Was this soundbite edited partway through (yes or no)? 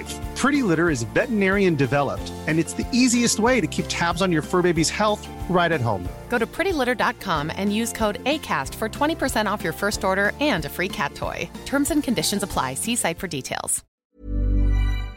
yes